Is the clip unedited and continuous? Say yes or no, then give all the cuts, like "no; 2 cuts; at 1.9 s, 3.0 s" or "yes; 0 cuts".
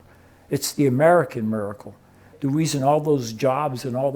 no; 1 cut; at 2.3 s